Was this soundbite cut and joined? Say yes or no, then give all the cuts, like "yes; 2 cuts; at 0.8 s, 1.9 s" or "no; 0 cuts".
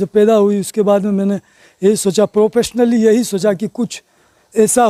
no; 0 cuts